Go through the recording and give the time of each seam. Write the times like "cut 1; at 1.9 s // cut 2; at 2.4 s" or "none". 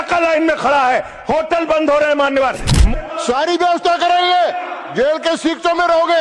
cut 1; at 2.7 s // cut 2; at 4.8 s